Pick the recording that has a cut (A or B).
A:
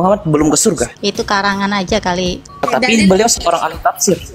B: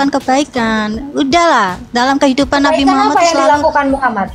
A